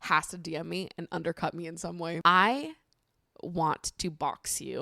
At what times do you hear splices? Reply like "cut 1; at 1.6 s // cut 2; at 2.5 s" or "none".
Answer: cut 1; at 2.2 s